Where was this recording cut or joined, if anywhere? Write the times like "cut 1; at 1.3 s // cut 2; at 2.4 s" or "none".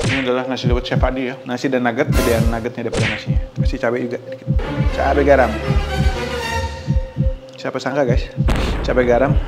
cut 1; at 1.5 s